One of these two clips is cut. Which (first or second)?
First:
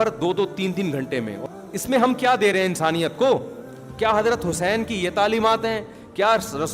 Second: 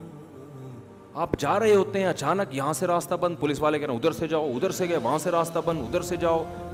first